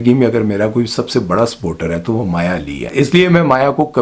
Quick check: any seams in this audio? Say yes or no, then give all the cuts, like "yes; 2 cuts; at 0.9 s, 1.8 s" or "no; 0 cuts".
yes; 1 cut; at 2.8 s